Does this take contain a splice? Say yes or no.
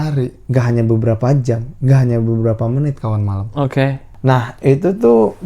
yes